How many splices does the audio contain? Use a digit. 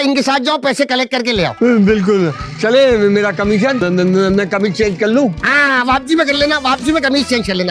1